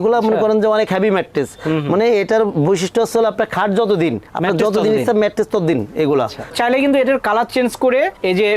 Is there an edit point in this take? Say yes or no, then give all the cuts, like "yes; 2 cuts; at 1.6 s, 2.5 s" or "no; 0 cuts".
yes; 1 cut; at 6.5 s